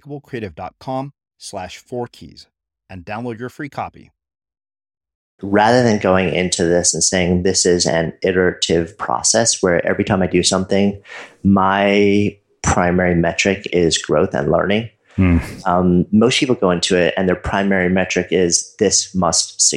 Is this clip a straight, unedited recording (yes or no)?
no